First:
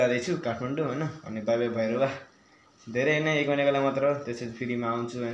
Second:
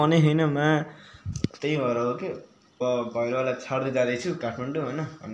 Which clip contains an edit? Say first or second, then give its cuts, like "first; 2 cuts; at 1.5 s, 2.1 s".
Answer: second; 1 cut; at 2.8 s